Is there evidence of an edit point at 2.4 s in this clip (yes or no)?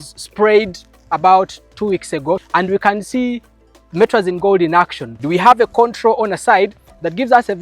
yes